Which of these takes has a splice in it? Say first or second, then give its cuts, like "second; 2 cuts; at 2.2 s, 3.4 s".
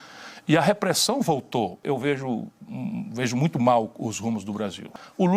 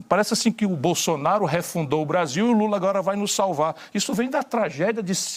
first; 1 cut; at 1.8 s